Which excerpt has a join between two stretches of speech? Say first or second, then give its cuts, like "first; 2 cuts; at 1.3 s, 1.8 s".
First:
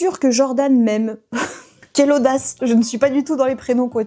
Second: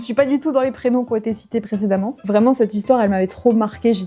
second; 1 cut; at 2.2 s